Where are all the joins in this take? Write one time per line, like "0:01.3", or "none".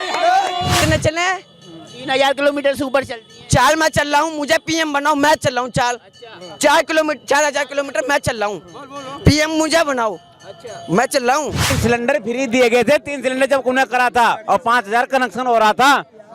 0:00.8
0:11.8